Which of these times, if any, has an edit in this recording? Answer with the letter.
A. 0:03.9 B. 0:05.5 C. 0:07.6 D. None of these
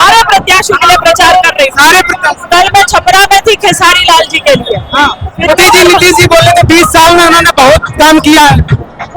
B